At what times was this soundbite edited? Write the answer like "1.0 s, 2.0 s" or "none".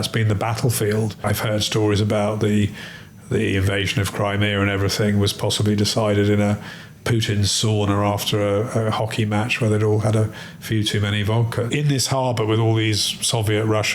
1.2 s, 11.7 s